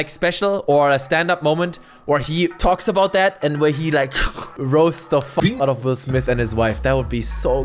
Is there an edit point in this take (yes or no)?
no